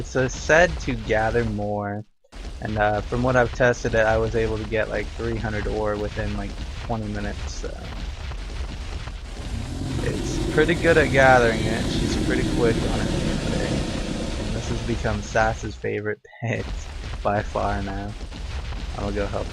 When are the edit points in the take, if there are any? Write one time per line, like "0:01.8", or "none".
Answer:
0:09.6

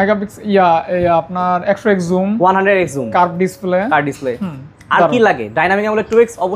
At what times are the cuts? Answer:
none

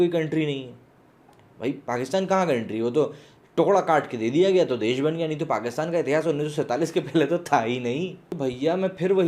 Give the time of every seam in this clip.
0:08.2

